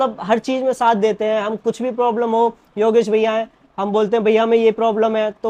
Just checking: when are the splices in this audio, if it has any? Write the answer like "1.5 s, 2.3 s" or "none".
none